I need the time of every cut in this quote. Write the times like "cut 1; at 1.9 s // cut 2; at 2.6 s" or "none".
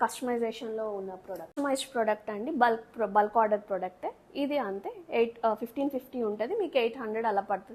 cut 1; at 1.5 s

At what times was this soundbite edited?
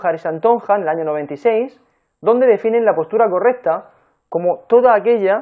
cut 1; at 1.2 s

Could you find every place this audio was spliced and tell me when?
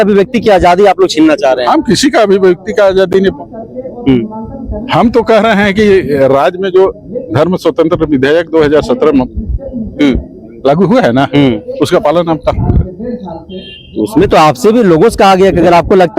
none

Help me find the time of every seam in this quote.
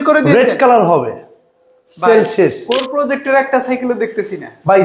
cut 1; at 2.6 s

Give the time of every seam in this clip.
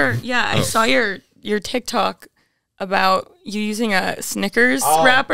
none

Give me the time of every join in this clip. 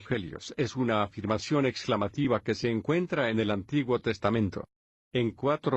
cut 1; at 3.1 s

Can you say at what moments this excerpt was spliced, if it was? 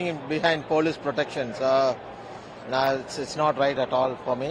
none

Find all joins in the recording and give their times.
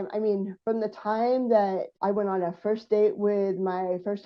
cut 1; at 1.9 s

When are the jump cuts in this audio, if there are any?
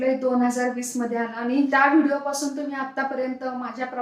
cut 1; at 1.7 s

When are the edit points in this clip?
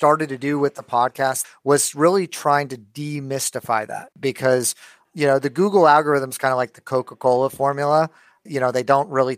cut 1; at 1.5 s // cut 2; at 4.2 s

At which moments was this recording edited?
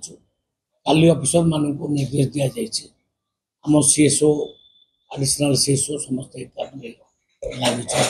none

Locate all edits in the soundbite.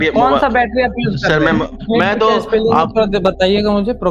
cut 1; at 1.8 s

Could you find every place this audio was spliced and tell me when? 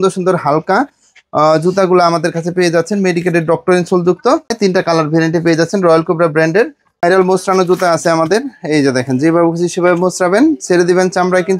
cut 1; at 4.6 s // cut 2; at 7.0 s

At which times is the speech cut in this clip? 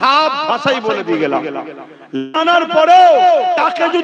cut 1; at 2.4 s

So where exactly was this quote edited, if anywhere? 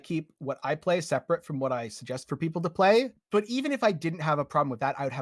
cut 1; at 3.2 s

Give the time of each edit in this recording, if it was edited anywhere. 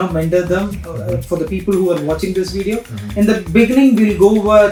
none

